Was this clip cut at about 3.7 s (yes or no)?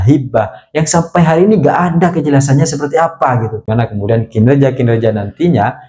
yes